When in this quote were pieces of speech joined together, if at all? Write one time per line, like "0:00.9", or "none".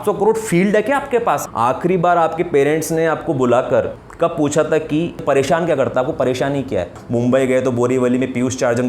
0:01.5
0:04.0
0:05.2
0:07.0